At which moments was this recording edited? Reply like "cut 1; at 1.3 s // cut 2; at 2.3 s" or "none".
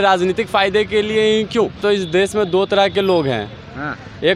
cut 1; at 1.8 s